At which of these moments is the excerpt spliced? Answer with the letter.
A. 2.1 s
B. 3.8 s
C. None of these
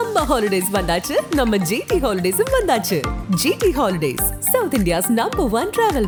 C